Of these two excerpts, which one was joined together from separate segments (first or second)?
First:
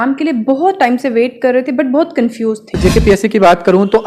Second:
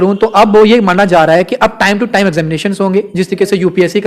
first